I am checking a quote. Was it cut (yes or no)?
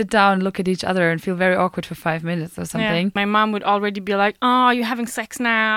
yes